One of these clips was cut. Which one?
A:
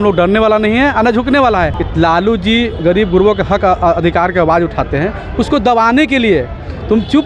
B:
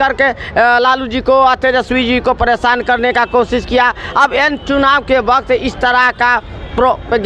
A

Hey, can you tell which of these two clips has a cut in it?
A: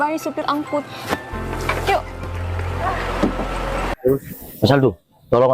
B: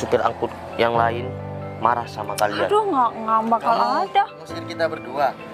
A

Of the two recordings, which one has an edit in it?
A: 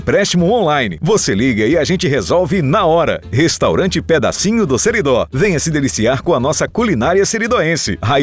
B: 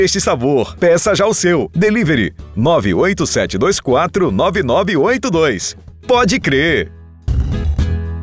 B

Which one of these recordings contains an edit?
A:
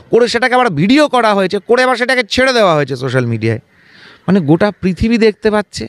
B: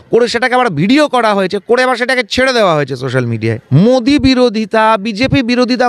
B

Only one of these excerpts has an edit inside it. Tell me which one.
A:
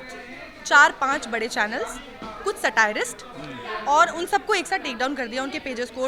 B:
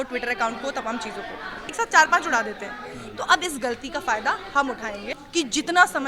B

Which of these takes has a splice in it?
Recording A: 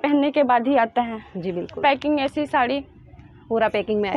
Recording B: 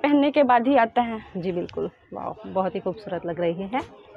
A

